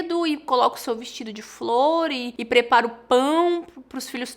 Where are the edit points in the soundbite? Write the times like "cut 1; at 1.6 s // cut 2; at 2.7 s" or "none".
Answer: cut 1; at 2.3 s

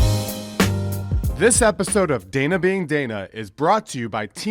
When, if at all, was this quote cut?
cut 1; at 1.2 s

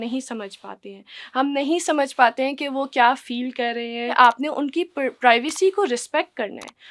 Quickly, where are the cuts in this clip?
cut 1; at 4.1 s

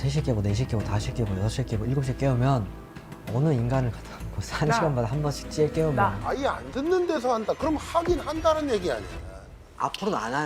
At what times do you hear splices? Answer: cut 1; at 6.2 s

